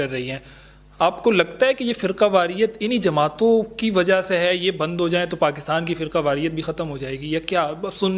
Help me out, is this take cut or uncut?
uncut